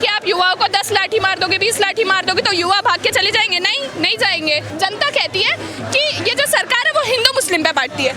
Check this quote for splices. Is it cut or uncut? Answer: cut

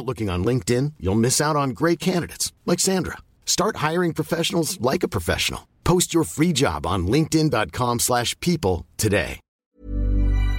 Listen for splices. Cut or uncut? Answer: cut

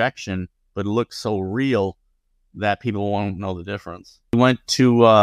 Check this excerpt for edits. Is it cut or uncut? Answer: cut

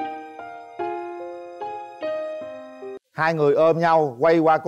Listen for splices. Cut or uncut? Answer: cut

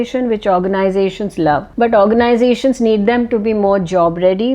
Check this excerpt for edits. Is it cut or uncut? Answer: cut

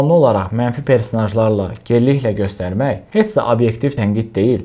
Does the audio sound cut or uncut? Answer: uncut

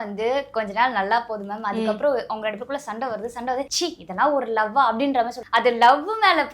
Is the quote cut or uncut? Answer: cut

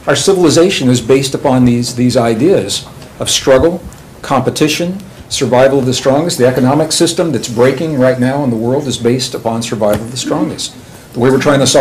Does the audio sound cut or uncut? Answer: cut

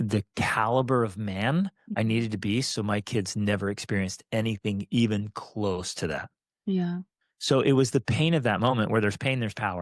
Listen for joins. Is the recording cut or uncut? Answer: uncut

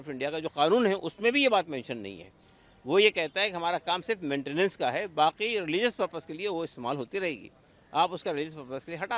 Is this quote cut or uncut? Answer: uncut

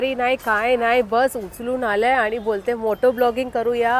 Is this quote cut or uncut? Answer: uncut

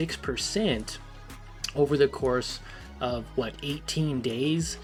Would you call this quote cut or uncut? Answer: uncut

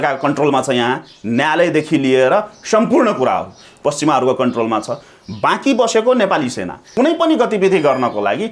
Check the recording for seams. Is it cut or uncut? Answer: cut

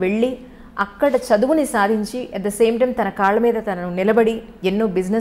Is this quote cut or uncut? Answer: uncut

